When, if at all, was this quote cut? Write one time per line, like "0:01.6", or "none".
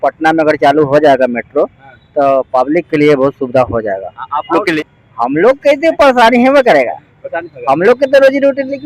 0:04.8